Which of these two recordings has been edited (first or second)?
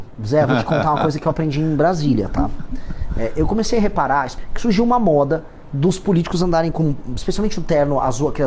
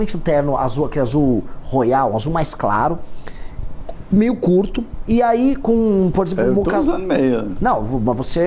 first